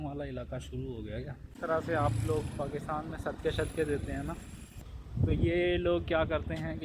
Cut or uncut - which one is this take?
cut